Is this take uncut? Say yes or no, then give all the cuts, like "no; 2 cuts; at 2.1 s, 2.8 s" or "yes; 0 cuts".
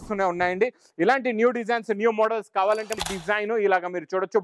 no; 1 cut; at 3.0 s